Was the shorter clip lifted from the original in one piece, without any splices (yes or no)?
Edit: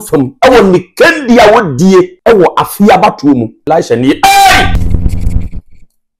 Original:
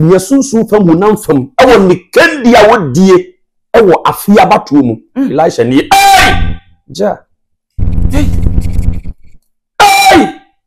no